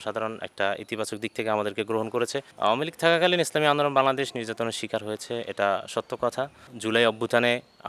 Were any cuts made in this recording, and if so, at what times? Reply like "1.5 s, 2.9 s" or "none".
2.5 s, 6.7 s